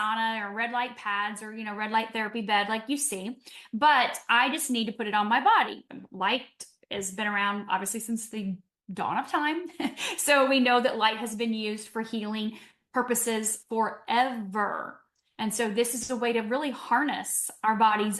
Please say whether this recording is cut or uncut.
cut